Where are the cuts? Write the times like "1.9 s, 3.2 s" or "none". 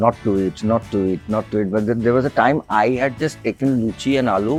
none